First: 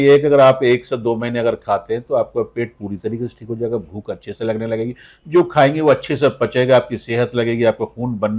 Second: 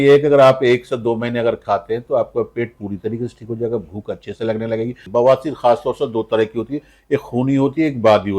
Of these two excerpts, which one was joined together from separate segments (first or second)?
second